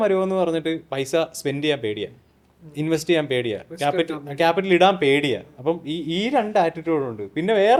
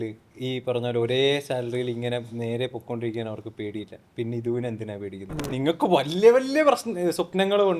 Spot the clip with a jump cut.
second; 1 cut; at 5.5 s

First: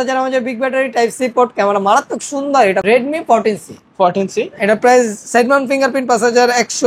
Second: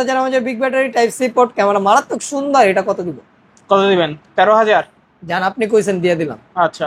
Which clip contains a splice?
first; 1 cut; at 2.8 s

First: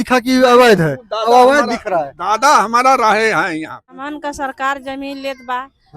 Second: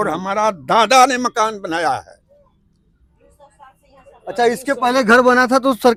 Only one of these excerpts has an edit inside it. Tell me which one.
first; 1 cut; at 4.0 s

